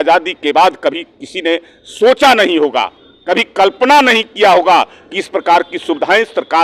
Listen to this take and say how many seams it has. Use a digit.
0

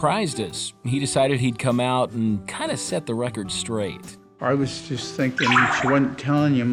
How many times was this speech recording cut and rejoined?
0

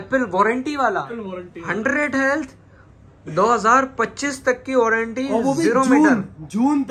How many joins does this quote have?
1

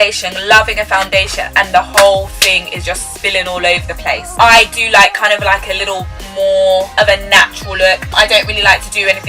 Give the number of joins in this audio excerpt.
1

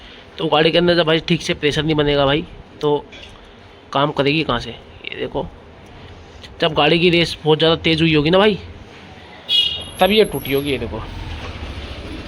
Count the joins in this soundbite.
0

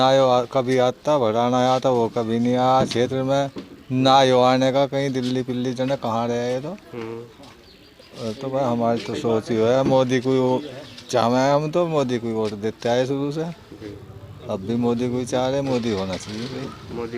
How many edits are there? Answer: 0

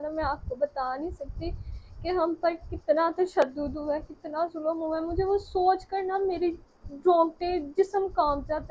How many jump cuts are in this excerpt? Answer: 0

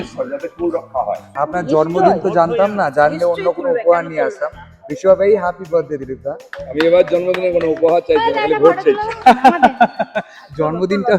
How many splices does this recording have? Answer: 1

